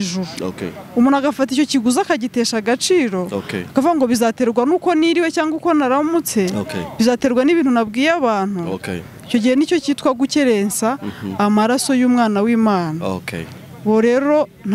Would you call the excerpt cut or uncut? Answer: uncut